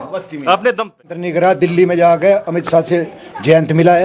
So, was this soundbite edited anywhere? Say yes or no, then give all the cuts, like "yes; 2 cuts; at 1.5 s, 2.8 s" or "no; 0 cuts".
yes; 1 cut; at 1.2 s